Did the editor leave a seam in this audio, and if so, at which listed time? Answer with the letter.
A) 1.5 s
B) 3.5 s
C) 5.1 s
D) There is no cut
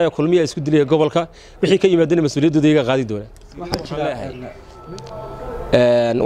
B